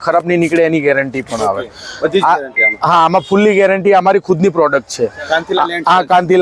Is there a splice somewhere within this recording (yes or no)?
no